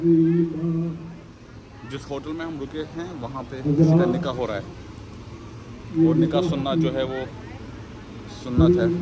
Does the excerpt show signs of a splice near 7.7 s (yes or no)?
no